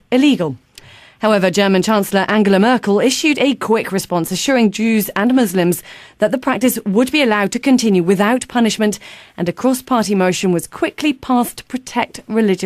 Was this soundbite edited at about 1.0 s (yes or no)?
no